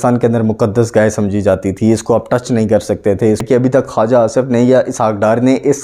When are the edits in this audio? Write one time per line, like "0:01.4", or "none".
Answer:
0:03.4